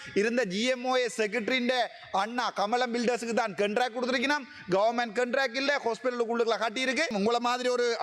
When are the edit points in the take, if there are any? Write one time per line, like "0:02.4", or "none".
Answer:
0:07.1